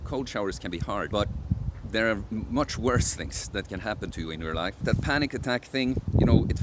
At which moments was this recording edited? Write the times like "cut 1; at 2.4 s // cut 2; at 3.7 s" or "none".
cut 1; at 1.1 s // cut 2; at 4.8 s